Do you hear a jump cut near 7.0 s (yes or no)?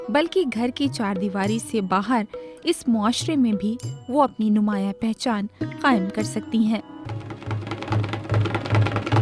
yes